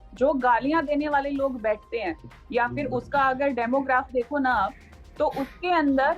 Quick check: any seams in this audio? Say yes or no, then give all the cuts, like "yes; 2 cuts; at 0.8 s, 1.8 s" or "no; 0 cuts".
no; 0 cuts